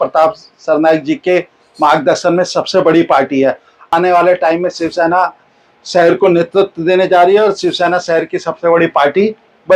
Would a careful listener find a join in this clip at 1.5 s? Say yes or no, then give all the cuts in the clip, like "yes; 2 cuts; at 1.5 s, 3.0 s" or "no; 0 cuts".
no; 1 cut; at 3.9 s